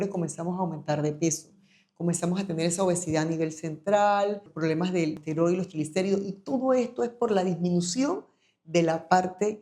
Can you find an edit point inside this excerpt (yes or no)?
yes